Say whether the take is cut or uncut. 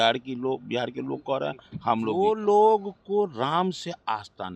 cut